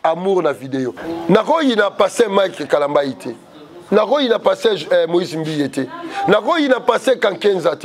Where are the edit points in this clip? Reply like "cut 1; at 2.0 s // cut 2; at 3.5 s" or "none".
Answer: cut 1; at 1.0 s